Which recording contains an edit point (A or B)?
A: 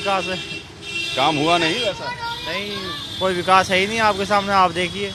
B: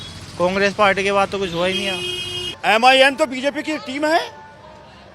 B